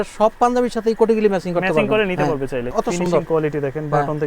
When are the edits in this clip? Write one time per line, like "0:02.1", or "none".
0:02.7